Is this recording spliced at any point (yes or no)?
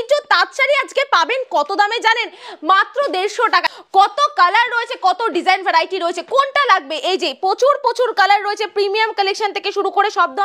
no